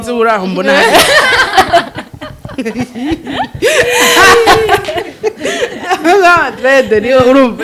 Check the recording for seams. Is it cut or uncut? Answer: uncut